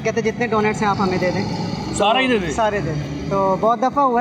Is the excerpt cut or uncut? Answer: uncut